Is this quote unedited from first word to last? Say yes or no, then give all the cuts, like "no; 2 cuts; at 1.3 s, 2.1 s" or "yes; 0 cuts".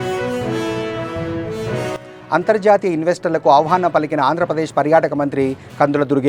no; 1 cut; at 2.0 s